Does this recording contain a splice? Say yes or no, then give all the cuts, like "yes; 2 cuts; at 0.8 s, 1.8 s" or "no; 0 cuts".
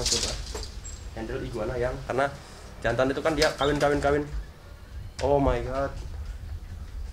yes; 1 cut; at 2.0 s